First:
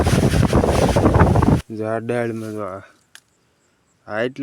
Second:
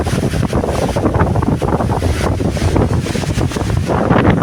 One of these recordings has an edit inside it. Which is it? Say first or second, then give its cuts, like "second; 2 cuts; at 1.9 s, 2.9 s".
first; 1 cut; at 1.6 s